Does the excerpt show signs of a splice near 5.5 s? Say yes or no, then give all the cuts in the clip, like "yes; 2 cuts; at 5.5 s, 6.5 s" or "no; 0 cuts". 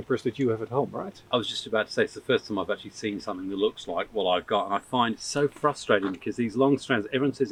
no; 0 cuts